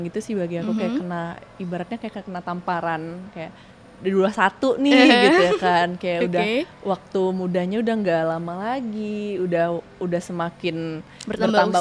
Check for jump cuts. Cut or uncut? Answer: uncut